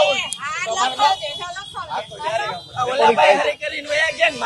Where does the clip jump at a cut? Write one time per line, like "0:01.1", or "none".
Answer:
0:02.7